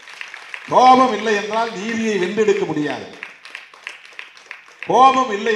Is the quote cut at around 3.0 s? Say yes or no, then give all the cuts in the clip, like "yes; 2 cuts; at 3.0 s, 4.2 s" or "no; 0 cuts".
no; 0 cuts